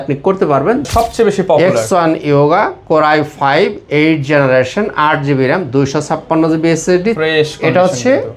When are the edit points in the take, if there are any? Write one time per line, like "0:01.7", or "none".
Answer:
0:00.9
0:07.2